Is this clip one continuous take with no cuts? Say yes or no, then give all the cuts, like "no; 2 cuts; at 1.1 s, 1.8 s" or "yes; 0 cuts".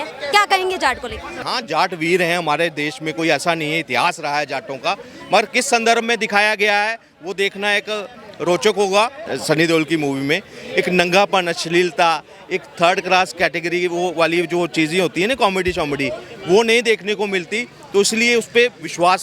no; 2 cuts; at 1.4 s, 9.3 s